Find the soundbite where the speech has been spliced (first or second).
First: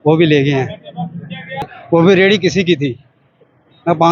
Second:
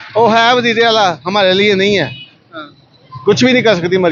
first